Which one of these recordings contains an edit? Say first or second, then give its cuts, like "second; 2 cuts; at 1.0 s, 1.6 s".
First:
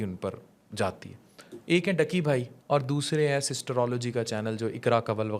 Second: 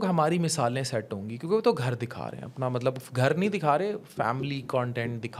first; 1 cut; at 2.5 s